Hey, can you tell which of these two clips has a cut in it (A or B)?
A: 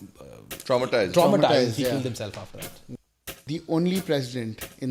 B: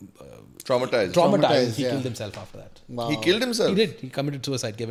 A